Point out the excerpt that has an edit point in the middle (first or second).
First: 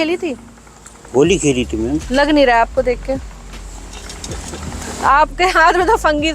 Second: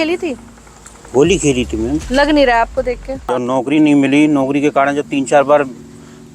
second